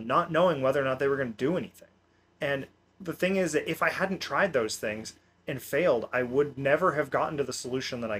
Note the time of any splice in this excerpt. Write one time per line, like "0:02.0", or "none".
none